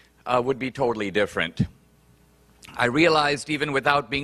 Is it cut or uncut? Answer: uncut